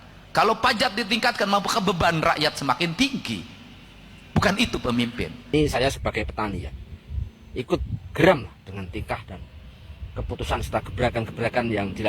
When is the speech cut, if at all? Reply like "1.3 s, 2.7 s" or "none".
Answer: 5.3 s